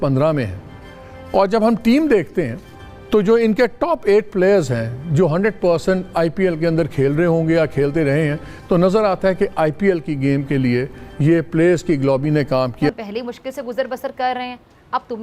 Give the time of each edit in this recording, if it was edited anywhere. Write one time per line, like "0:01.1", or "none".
0:12.9